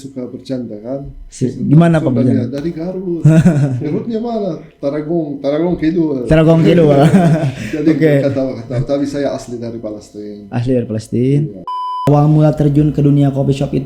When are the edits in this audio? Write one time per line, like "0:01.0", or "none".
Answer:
0:12.1